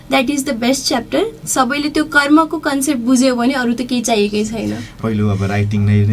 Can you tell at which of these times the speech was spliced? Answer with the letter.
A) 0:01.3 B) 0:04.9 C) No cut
B